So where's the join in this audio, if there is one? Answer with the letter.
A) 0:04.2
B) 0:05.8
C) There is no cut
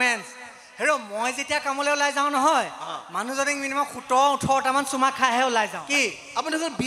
B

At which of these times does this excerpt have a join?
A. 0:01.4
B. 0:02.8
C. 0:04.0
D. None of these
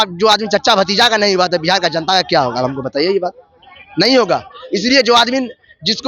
D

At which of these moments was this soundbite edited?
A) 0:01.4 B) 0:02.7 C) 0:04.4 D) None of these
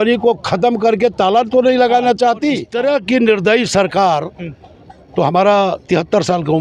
B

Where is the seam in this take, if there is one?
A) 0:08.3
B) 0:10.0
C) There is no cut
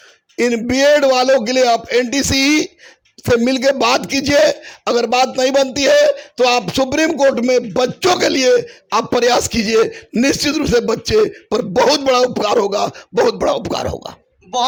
C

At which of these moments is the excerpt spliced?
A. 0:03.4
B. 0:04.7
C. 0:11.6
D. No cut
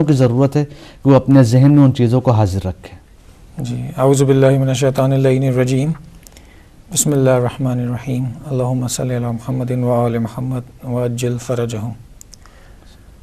B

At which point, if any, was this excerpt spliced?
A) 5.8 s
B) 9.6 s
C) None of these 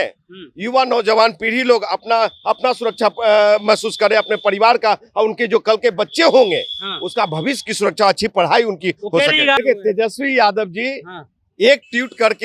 B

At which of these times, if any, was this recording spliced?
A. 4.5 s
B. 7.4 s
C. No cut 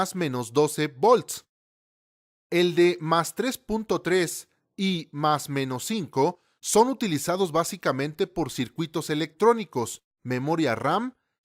A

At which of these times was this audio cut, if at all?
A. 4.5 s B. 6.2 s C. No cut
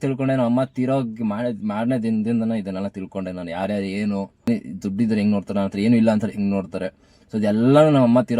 A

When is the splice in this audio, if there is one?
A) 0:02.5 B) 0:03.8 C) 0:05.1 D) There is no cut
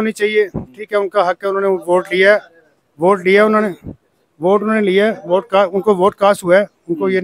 D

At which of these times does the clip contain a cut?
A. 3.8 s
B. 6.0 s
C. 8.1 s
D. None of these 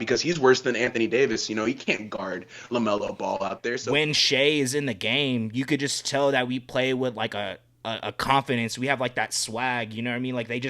A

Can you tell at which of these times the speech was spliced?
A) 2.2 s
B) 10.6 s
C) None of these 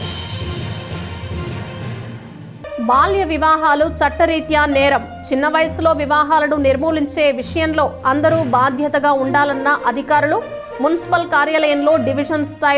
A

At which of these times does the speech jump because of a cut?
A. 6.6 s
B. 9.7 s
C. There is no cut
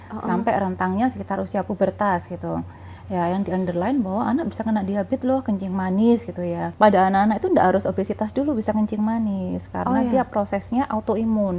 A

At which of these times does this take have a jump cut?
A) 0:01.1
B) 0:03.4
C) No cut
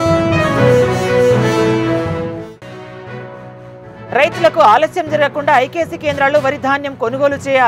B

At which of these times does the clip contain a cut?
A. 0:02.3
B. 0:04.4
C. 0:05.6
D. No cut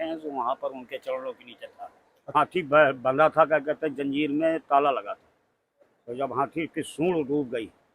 A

